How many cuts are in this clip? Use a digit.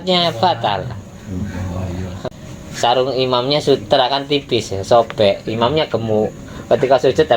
1